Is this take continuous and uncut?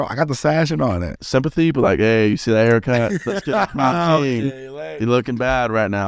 no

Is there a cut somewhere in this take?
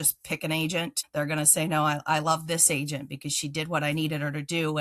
yes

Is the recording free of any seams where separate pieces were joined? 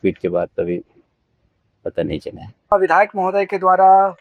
no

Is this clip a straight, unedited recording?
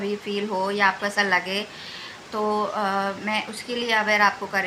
yes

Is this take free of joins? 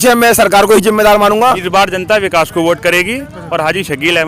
no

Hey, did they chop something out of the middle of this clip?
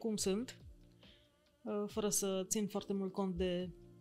no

